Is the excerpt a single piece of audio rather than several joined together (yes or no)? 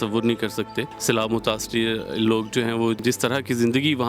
no